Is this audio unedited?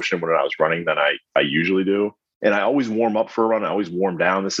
no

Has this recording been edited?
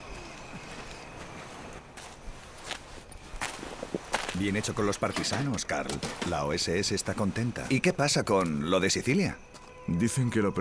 no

